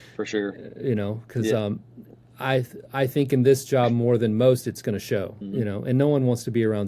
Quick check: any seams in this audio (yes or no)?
yes